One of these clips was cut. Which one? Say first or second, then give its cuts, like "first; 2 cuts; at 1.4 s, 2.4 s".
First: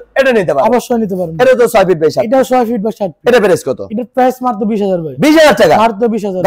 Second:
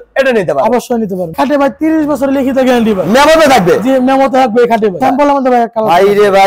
second; 2 cuts; at 1.3 s, 5.0 s